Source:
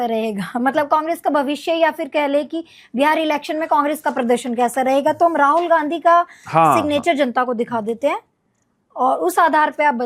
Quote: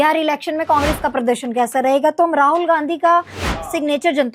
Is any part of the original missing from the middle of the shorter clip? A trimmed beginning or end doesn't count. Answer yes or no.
no